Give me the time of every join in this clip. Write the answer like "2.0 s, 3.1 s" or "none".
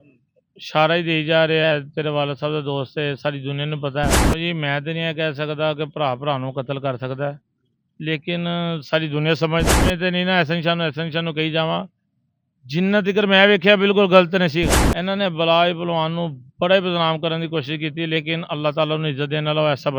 4.3 s, 9.7 s, 14.8 s